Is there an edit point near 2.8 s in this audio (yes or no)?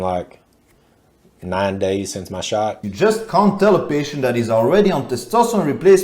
yes